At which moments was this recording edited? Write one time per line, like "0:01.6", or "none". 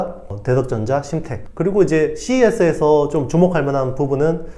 0:01.4